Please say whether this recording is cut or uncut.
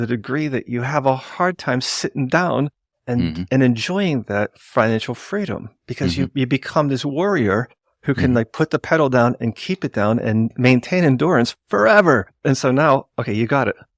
uncut